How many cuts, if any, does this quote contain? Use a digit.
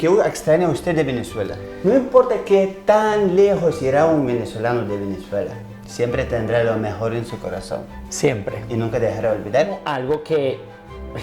2